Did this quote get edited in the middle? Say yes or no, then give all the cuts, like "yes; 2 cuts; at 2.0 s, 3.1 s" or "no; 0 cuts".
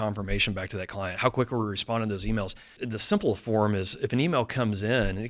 yes; 1 cut; at 2.8 s